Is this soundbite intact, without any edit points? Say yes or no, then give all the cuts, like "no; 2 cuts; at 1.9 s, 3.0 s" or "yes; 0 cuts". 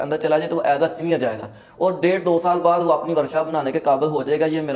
yes; 0 cuts